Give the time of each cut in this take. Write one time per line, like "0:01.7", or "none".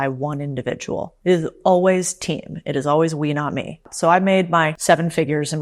0:01.1
0:03.9
0:04.8